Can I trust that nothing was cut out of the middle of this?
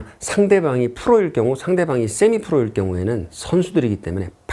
yes; 0 cuts

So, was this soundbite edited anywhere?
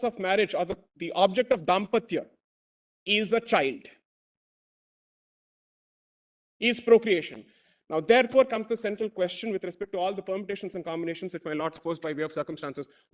no; 0 cuts

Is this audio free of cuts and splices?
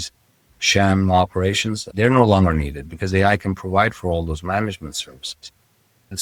yes; 0 cuts

